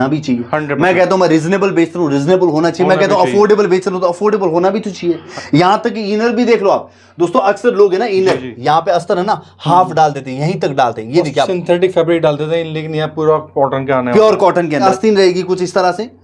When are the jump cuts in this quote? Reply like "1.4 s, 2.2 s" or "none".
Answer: 5.3 s, 14.8 s